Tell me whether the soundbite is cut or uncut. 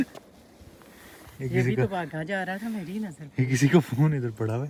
uncut